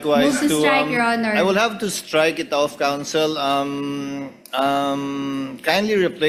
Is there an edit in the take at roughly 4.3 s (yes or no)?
no